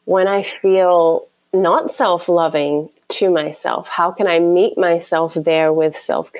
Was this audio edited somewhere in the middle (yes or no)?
no